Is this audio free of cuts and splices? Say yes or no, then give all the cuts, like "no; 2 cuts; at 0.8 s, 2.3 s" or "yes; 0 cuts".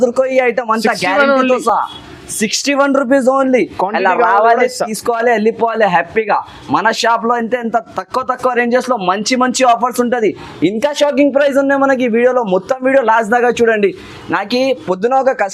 yes; 0 cuts